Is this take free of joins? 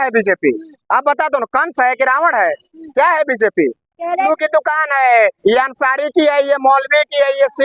no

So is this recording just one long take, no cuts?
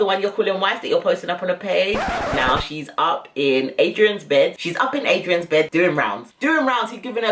no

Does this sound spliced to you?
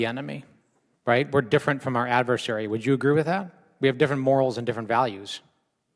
no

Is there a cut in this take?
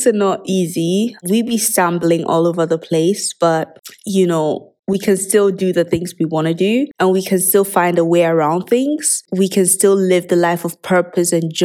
no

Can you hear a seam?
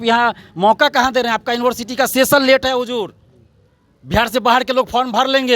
no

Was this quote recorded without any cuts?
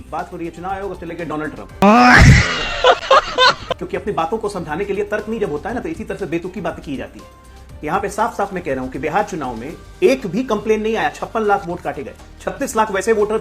yes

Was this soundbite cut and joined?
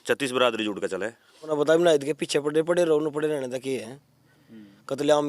yes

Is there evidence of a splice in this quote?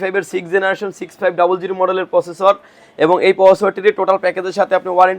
no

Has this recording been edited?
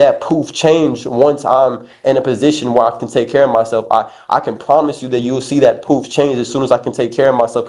no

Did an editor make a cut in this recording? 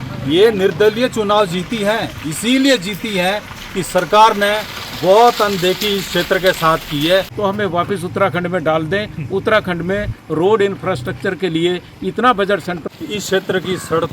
yes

